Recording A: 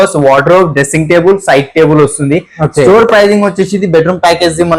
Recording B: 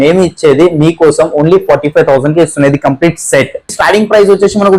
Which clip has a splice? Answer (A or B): B